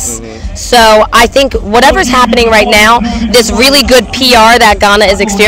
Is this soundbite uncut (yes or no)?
yes